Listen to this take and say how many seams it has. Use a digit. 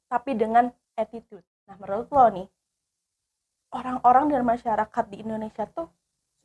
1